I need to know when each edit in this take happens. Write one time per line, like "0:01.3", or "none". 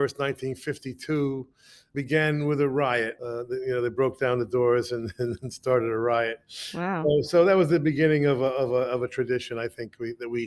0:01.9
0:03.2